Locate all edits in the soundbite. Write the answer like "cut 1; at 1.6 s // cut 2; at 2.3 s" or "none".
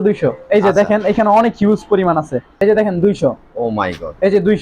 cut 1; at 2.6 s